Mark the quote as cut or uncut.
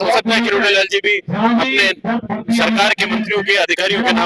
uncut